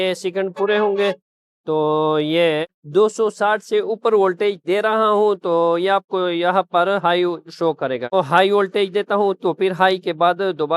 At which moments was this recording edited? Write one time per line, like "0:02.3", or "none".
0:02.8
0:08.1